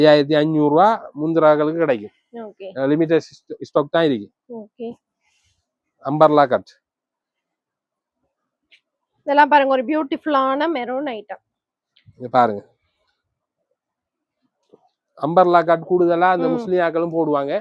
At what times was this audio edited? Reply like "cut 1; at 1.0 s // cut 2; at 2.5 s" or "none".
none